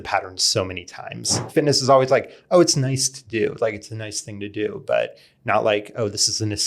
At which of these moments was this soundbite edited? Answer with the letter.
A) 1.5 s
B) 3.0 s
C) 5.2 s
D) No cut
A